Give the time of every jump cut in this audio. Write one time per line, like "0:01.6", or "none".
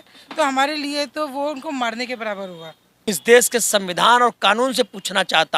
0:03.1

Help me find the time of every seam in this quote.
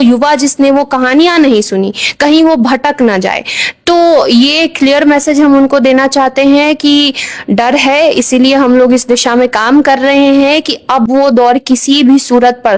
none

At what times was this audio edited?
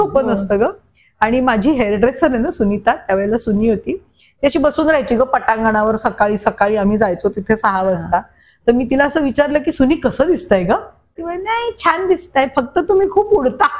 0:11.2

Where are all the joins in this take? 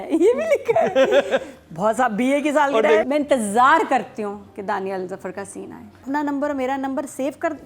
0:03.0
0:06.0

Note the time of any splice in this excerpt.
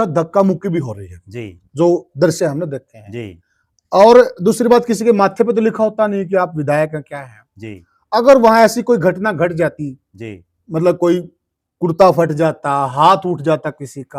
none

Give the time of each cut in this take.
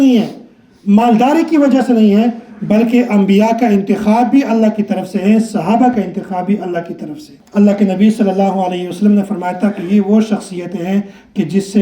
0:07.4

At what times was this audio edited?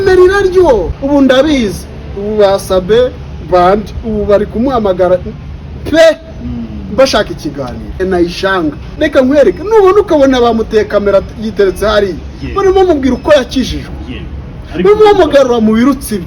0:00.9
0:08.0
0:09.0

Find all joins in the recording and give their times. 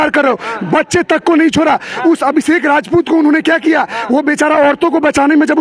none

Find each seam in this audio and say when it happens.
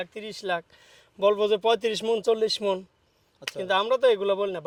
none

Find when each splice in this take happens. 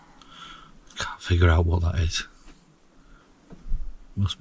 0:03.2

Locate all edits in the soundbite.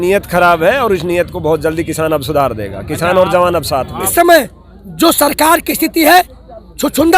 0:04.1

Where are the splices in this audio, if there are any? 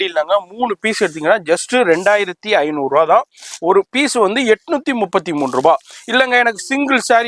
none

